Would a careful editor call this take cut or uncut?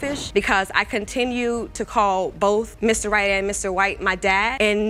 uncut